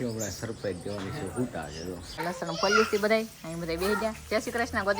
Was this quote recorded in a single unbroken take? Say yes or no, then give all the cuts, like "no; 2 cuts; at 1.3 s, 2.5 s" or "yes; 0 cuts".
no; 1 cut; at 2.2 s